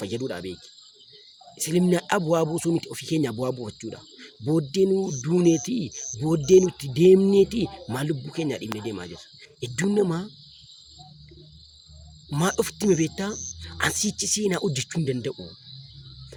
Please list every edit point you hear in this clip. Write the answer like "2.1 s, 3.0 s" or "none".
none